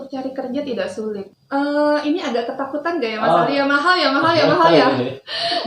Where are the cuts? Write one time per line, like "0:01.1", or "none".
0:01.3